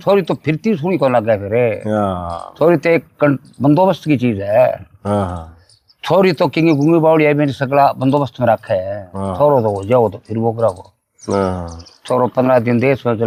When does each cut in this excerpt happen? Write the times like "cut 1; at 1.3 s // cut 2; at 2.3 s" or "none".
none